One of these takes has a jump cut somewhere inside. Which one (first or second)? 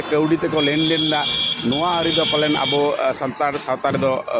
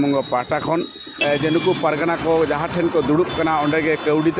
second